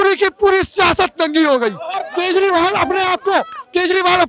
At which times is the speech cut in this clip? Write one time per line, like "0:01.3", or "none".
0:02.0